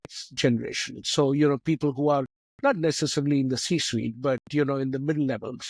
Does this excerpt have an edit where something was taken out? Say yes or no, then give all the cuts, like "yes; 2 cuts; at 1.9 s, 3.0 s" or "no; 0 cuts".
no; 0 cuts